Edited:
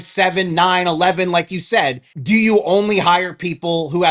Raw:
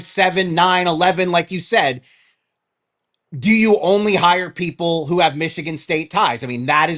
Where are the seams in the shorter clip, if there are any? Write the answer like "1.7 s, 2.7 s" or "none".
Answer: 2.1 s